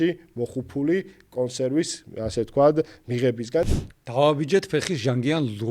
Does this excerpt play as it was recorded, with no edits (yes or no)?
no